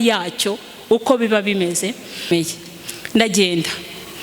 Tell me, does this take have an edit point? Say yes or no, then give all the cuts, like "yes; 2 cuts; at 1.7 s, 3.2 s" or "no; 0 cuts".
yes; 1 cut; at 2.3 s